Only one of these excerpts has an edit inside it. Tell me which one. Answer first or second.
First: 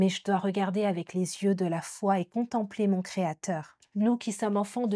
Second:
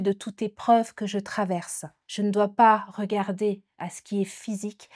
first